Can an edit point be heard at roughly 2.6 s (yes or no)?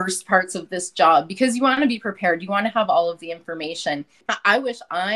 no